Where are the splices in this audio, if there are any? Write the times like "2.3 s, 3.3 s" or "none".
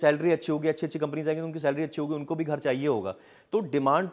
none